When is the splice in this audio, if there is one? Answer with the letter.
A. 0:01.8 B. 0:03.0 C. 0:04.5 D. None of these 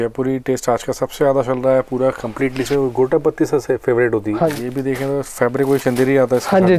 C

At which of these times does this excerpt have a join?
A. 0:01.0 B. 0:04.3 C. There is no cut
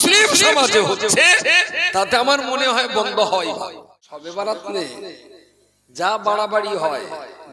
B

